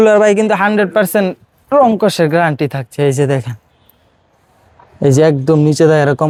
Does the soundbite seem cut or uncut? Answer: uncut